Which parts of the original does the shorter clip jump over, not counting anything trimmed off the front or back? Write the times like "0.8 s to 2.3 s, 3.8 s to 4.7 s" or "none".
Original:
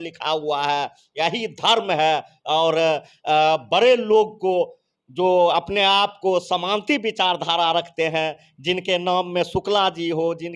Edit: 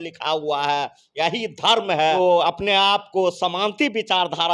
2.2 s to 5.3 s

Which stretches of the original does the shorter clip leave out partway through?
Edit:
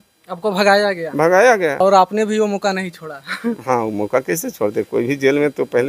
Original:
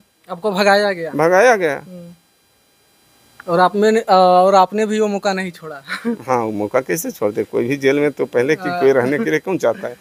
1.8 s to 4.4 s

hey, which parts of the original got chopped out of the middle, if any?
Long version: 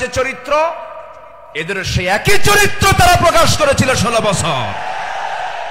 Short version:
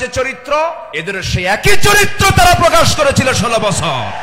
0.9 s to 1.5 s

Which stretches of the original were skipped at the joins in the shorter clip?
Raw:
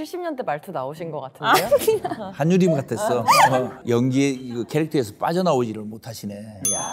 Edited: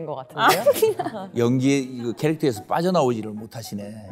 2.3 s to 3.7 s

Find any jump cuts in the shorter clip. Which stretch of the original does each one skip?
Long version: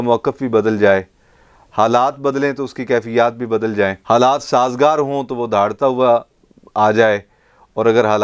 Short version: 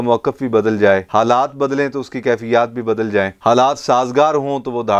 1.1 s to 1.7 s

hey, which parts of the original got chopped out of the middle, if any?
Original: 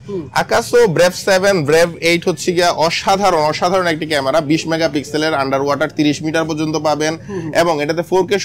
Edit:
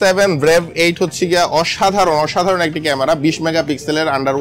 none

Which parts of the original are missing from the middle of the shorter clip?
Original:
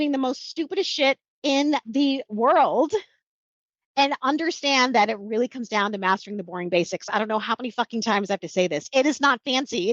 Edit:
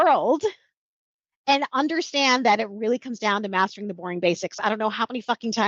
none

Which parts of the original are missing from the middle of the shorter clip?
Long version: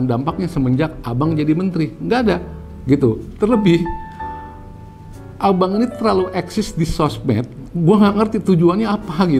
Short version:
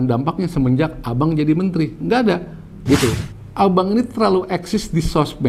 3.2 s to 5.1 s

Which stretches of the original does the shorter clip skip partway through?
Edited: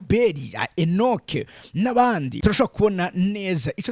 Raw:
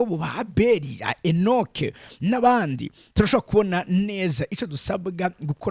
2.8 s to 3.0 s

